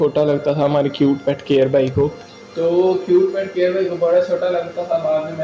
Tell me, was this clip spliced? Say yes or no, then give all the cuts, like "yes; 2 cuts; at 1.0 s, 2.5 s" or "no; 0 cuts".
no; 0 cuts